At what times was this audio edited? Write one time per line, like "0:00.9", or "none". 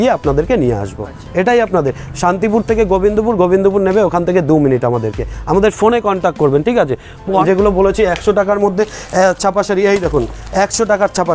0:07.4